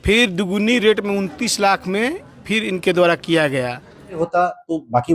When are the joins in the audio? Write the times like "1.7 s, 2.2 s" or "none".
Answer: 4.2 s